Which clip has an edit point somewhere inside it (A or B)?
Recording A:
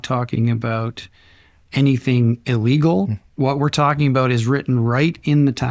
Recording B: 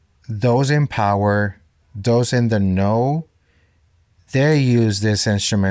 A